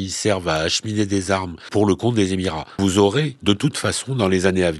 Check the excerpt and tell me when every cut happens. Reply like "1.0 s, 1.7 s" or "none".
1.7 s, 2.7 s, 3.3 s